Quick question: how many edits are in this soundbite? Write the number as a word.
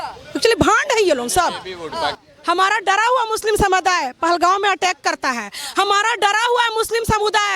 one